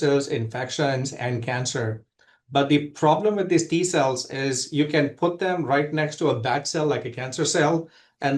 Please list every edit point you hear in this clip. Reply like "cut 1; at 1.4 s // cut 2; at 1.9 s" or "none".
none